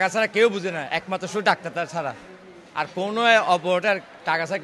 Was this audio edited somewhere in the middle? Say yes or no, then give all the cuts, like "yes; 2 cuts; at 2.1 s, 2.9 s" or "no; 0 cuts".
no; 0 cuts